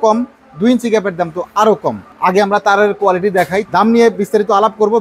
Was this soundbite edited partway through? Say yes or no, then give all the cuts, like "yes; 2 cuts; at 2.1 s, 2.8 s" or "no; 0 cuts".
yes; 2 cuts; at 2.1 s, 3.6 s